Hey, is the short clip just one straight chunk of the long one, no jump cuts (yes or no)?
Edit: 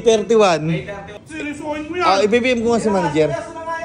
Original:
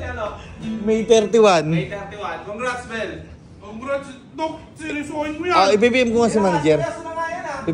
no